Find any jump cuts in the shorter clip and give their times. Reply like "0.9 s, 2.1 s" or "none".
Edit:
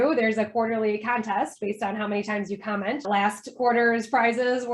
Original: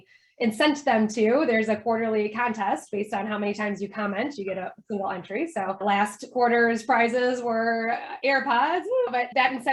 3.0 s

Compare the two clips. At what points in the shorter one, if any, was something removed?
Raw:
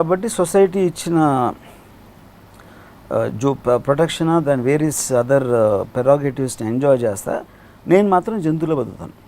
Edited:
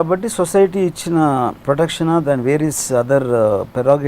1.6 s

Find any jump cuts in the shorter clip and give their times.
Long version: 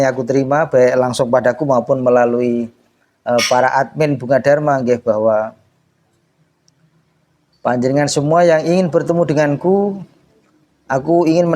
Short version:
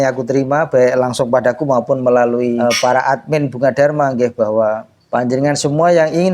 2.6 s, 4.9 s

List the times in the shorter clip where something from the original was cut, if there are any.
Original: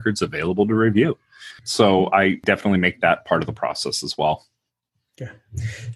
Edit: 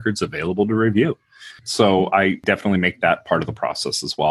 none

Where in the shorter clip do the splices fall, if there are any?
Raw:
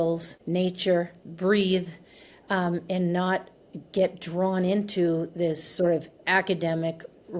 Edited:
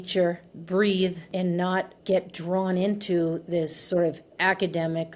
1.6 s

